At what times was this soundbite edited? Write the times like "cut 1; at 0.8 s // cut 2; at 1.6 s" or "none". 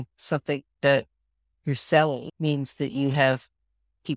cut 1; at 2.3 s